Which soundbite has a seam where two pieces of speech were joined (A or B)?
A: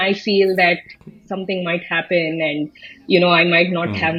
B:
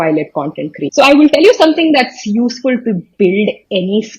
B